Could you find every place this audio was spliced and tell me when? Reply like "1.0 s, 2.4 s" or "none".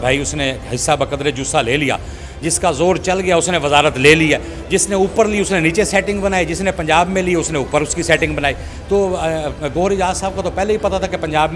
none